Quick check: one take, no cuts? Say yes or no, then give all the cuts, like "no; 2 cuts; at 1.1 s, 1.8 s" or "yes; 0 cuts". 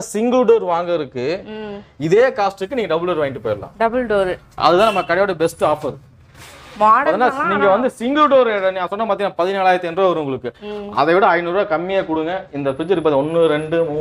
yes; 0 cuts